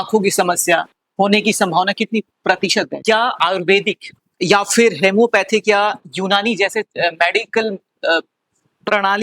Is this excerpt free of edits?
no; 1 cut; at 3.0 s

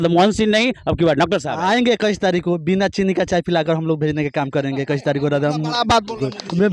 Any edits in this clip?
yes; 1 cut; at 1.5 s

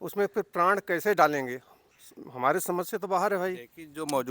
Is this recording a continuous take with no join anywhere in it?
yes; 0 cuts

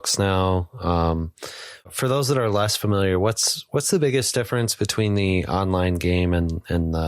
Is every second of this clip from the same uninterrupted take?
no; 1 cut; at 1.9 s

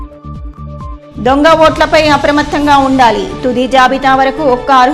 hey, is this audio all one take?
no; 1 cut; at 1.1 s

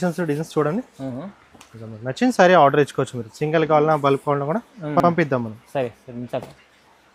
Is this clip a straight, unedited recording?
yes; 0 cuts

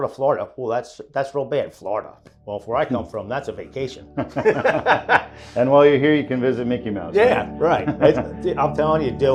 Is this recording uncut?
yes; 0 cuts

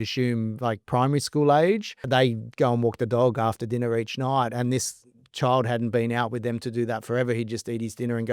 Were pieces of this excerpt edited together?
yes; 1 cut; at 2.0 s

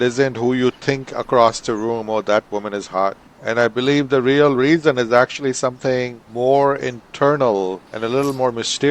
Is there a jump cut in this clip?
yes; 3 cuts; at 3.3 s, 6.2 s, 7.9 s

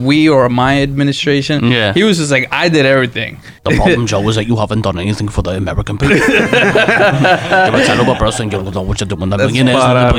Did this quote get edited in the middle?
yes; 1 cut; at 3.5 s

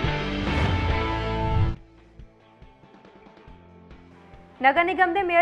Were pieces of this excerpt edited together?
yes; 1 cut; at 1.5 s

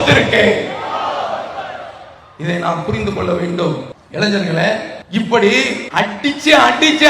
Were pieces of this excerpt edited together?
yes; 3 cuts; at 4.0 s, 4.9 s, 5.8 s

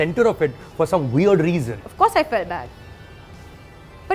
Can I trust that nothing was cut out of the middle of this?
no; 1 cut; at 1.8 s

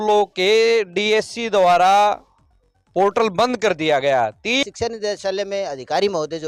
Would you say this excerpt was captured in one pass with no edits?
no; 1 cut; at 4.6 s

